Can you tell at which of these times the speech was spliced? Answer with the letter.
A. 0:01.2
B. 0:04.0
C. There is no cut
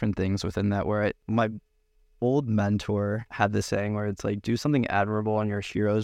A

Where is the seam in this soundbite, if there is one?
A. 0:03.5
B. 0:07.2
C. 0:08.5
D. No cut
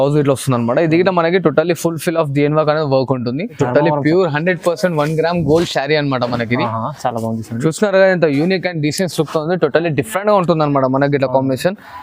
A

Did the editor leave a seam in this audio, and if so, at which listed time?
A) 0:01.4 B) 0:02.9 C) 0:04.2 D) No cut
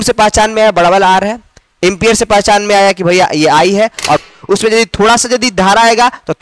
C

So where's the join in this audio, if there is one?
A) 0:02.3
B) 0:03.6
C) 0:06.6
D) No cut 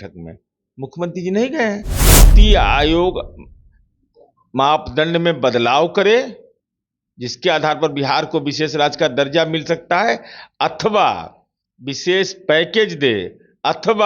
A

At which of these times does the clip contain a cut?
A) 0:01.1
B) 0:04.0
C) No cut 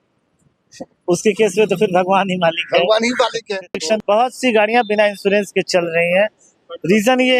B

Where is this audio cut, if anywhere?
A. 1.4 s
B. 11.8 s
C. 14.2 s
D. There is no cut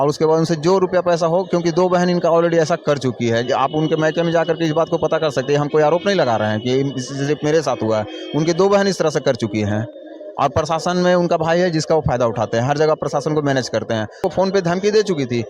C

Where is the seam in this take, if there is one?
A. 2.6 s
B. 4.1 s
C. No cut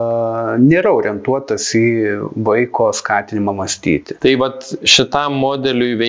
B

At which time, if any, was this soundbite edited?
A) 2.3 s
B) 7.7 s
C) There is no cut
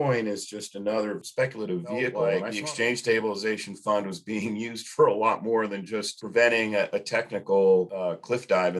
A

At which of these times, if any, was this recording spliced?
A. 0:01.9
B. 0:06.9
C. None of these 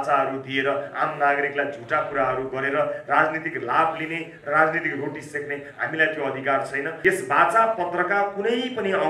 B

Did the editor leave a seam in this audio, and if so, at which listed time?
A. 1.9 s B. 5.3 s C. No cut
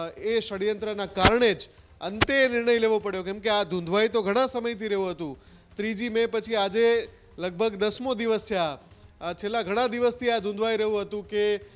C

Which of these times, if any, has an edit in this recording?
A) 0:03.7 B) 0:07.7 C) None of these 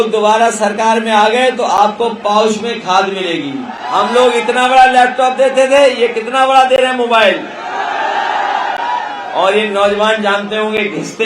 A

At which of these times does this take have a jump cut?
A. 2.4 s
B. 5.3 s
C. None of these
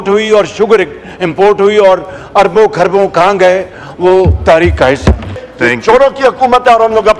B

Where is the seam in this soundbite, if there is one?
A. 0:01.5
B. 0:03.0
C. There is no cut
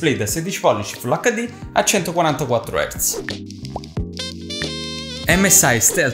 C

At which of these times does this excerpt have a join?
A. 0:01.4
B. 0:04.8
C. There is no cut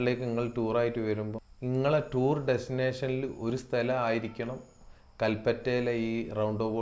A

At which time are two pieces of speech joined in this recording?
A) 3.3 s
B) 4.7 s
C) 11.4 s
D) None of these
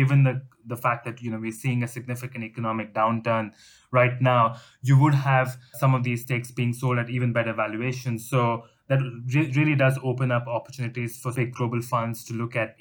C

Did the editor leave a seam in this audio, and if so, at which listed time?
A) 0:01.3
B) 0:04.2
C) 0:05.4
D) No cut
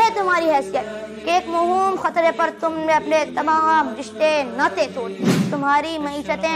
C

